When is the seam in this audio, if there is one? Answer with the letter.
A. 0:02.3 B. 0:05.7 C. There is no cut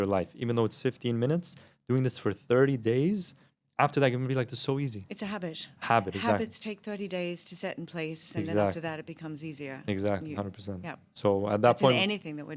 C